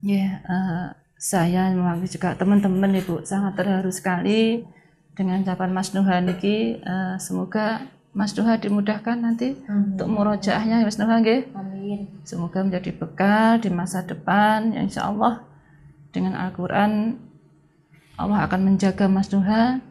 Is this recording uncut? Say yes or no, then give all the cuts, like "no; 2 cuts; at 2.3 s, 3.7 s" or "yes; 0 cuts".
yes; 0 cuts